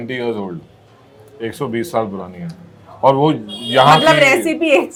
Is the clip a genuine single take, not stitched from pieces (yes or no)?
yes